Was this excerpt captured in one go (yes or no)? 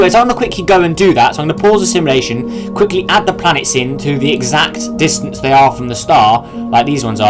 no